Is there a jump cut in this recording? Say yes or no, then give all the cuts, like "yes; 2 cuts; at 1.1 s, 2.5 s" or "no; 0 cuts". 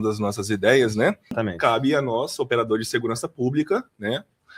yes; 1 cut; at 1.4 s